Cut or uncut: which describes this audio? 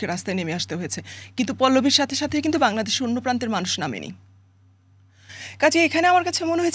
uncut